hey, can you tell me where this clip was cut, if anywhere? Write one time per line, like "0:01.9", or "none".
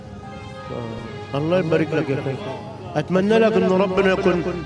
none